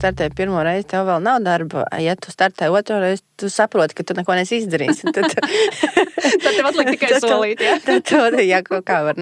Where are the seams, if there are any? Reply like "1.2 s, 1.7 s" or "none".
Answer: none